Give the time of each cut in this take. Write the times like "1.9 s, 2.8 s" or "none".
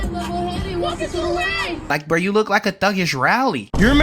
1.8 s